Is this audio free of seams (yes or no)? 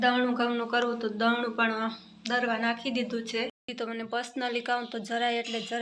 no